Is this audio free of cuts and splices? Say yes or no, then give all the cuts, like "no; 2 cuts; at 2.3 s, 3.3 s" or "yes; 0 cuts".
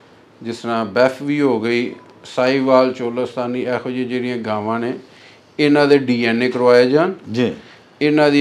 yes; 0 cuts